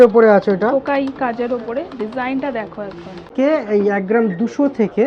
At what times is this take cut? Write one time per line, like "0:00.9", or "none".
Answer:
0:03.3